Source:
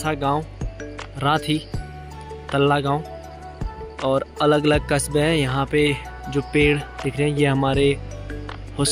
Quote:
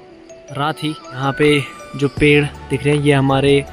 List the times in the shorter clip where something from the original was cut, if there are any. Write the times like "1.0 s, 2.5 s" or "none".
1.2 s